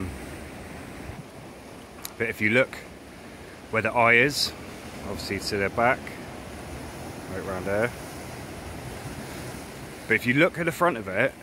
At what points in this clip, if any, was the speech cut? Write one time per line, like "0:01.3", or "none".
0:01.1